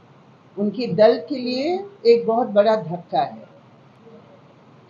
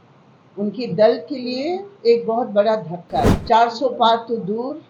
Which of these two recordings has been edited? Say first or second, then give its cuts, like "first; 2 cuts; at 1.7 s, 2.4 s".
second; 1 cut; at 3.4 s